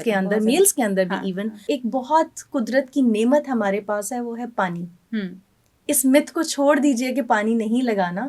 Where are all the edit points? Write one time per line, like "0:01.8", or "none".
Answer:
0:01.6